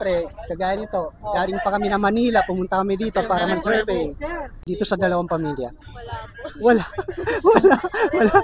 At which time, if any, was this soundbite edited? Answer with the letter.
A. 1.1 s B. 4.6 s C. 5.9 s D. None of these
B